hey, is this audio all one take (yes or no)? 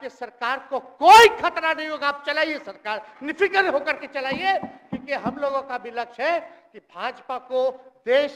yes